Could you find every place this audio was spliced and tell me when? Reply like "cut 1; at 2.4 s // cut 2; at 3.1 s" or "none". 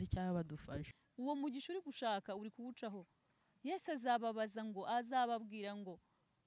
cut 1; at 1.0 s